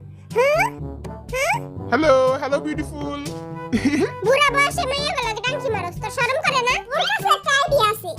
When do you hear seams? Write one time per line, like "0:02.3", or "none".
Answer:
0:07.0